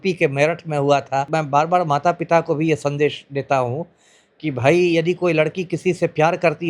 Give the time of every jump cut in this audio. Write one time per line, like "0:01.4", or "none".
0:01.3